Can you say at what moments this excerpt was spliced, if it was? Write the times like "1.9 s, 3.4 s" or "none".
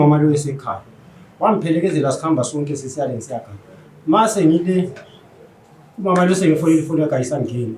none